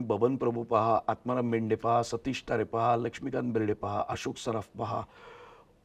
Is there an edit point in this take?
no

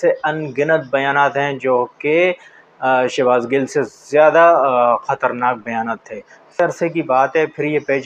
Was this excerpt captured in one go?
no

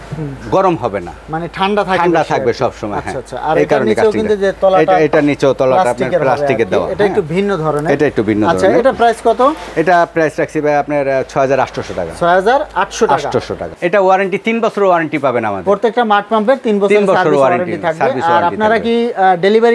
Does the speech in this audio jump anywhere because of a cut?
no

